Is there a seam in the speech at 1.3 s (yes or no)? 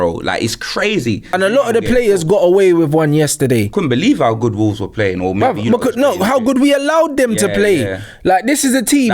yes